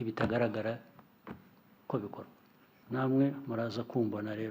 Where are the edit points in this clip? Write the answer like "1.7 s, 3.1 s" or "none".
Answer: 2.7 s